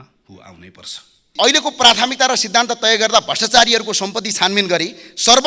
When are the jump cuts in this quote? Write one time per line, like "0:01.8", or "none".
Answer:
0:01.3